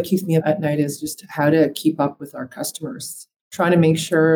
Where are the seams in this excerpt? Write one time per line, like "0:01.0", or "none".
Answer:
none